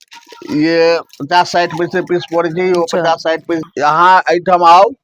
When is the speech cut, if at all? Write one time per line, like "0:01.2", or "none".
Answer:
0:03.6